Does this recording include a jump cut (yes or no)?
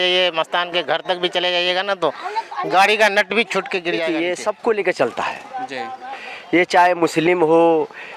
yes